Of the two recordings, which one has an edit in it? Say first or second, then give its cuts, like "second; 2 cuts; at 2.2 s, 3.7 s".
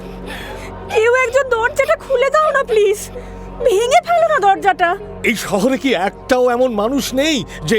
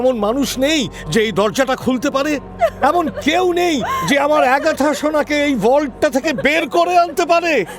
first; 1 cut; at 5.1 s